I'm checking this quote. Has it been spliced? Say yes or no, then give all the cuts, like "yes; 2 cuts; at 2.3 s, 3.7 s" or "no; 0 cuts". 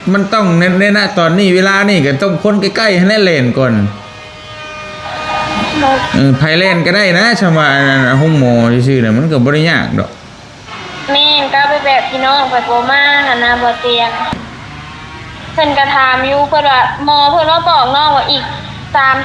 yes; 1 cut; at 14.4 s